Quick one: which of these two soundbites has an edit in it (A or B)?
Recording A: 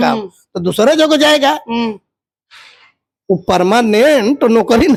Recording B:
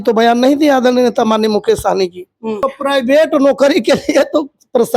B